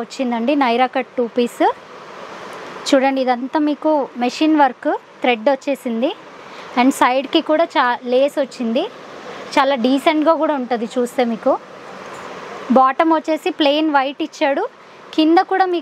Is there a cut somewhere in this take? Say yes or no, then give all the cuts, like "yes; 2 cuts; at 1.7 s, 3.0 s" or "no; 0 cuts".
no; 0 cuts